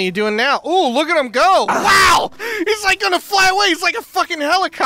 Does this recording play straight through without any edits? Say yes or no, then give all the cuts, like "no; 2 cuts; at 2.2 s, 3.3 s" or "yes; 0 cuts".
no; 1 cut; at 2.4 s